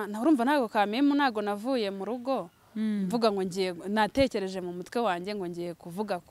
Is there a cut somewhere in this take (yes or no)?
no